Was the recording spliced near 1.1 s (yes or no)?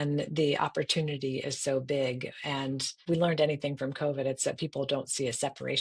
no